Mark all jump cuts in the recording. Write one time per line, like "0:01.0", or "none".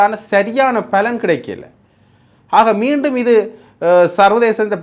none